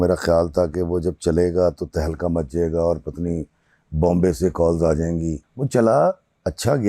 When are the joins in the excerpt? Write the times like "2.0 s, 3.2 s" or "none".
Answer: 5.5 s